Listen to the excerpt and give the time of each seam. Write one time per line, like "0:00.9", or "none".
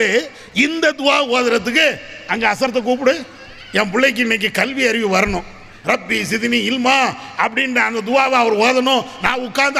none